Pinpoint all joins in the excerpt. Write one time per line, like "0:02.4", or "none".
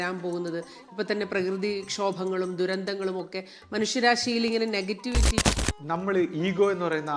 0:05.4